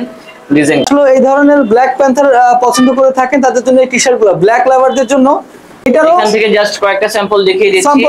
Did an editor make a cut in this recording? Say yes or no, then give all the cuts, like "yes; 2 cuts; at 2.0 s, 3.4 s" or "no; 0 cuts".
yes; 2 cuts; at 0.8 s, 5.6 s